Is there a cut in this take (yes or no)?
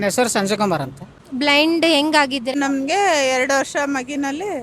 yes